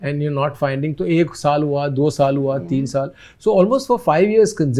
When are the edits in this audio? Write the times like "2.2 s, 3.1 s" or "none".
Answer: none